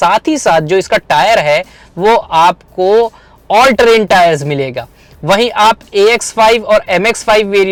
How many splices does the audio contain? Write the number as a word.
zero